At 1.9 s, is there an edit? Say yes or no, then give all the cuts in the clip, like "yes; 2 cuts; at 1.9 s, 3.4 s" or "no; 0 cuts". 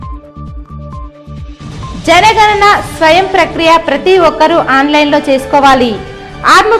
yes; 1 cut; at 1.9 s